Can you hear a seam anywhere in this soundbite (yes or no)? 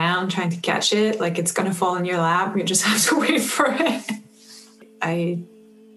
yes